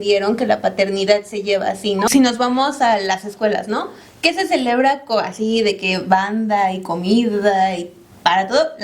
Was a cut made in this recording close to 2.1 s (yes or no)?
yes